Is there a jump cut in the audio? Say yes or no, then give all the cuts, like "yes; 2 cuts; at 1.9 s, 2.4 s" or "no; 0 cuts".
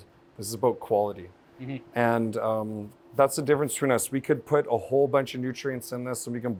no; 0 cuts